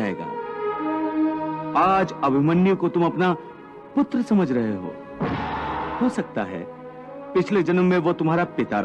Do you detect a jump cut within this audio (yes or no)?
yes